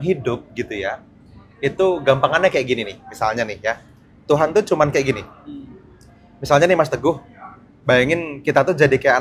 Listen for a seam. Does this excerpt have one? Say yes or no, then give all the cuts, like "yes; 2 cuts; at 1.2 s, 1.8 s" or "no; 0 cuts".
no; 0 cuts